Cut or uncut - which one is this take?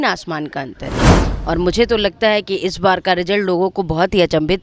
cut